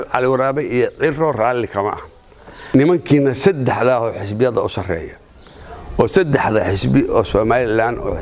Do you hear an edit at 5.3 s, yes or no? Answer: no